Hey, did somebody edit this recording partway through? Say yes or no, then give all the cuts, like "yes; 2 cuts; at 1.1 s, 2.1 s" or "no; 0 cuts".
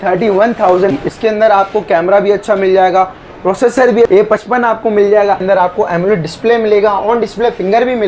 yes; 3 cuts; at 0.9 s, 4.1 s, 5.4 s